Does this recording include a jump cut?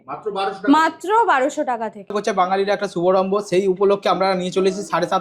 yes; 1 cut; at 2.2 s

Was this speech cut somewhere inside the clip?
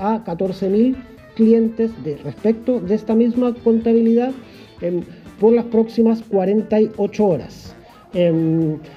no; 0 cuts

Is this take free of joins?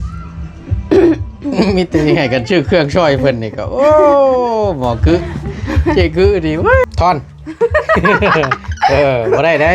no; 1 cut; at 6.8 s

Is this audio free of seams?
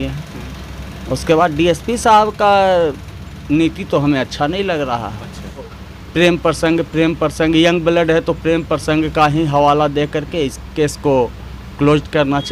no; 1 cut; at 5.7 s

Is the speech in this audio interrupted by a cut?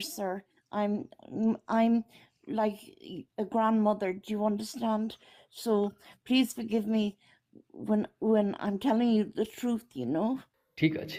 no; 0 cuts

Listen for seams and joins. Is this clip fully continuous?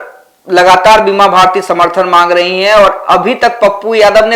yes; 0 cuts

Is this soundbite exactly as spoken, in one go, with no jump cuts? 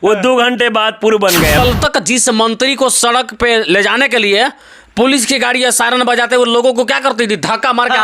no; 1 cut; at 1.6 s

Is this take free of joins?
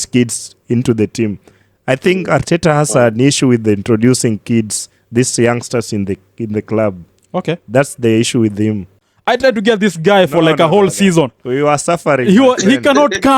no; 1 cut; at 9.1 s

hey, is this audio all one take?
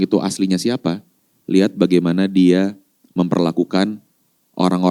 yes; 0 cuts

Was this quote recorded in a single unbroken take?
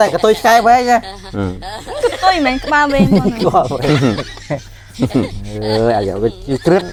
yes; 0 cuts

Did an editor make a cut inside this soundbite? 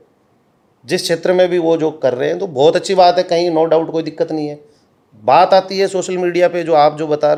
no; 0 cuts

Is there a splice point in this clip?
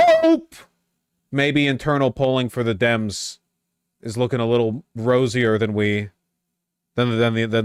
no; 0 cuts

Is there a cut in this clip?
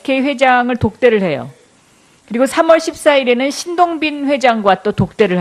no; 0 cuts

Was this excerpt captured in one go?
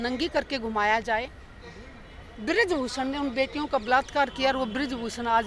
yes; 0 cuts

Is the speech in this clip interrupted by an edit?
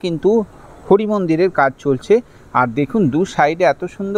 no; 0 cuts

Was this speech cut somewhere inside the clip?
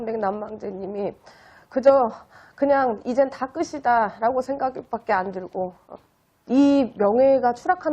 yes; 1 cut; at 5.8 s

